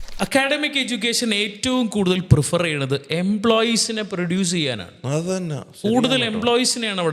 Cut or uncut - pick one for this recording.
uncut